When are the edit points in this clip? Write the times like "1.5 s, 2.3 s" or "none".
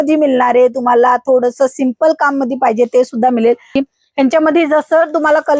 3.7 s